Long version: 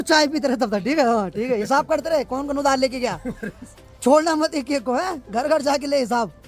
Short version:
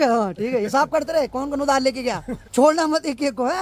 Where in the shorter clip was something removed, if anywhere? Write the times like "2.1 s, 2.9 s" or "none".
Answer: 2.3 s